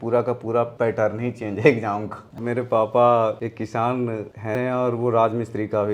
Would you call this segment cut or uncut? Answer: cut